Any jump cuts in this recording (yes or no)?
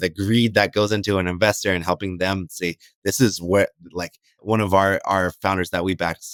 no